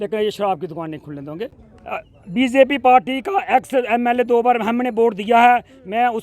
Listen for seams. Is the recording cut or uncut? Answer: cut